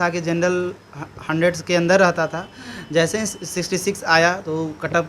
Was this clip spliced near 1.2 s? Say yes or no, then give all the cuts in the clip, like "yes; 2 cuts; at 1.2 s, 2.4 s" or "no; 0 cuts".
no; 0 cuts